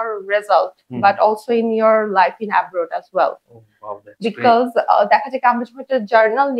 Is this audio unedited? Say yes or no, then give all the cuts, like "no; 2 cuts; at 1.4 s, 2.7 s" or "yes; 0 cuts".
yes; 0 cuts